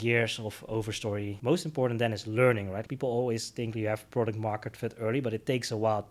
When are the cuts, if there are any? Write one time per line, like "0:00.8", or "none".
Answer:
0:01.3
0:02.8